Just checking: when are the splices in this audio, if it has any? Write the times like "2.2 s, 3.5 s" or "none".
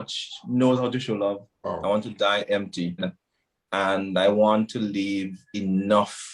1.5 s, 3.2 s

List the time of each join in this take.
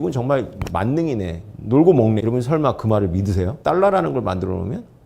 2.2 s, 3.5 s

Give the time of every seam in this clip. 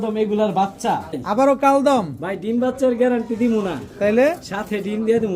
1.2 s

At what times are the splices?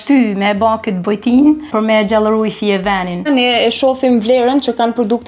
1.7 s, 3.3 s

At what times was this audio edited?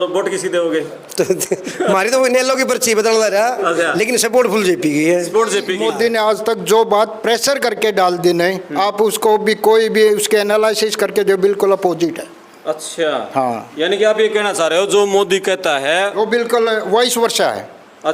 5.7 s

